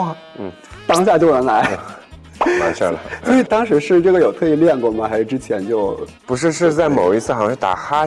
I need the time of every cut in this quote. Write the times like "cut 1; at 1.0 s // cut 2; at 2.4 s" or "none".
none

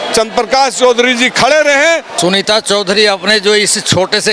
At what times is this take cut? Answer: cut 1; at 2.1 s

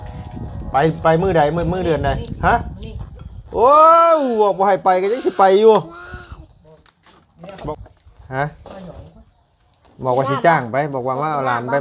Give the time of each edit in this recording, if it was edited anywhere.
cut 1; at 7.4 s

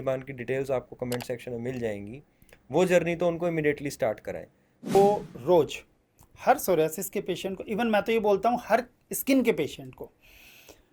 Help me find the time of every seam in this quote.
cut 1; at 4.9 s

